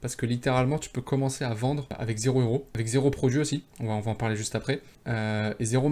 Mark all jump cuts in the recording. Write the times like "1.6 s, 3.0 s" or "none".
1.9 s, 2.7 s, 3.7 s, 4.9 s